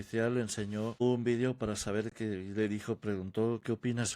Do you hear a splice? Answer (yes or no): yes